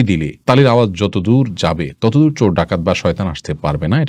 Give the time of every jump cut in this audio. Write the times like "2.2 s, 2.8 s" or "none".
none